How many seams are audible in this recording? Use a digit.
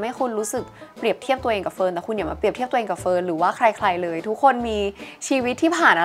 0